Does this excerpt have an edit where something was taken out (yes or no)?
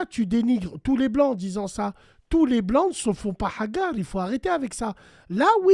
no